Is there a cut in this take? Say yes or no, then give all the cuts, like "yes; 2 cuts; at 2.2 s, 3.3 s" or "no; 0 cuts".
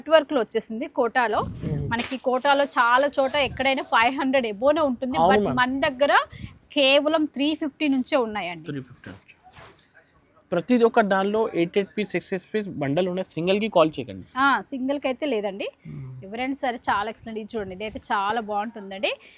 no; 0 cuts